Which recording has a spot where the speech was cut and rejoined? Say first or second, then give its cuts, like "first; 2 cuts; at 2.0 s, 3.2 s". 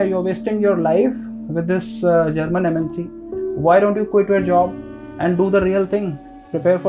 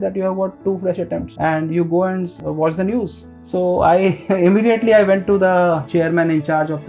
second; 2 cuts; at 1.3 s, 2.3 s